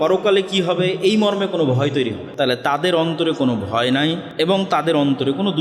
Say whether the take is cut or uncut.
cut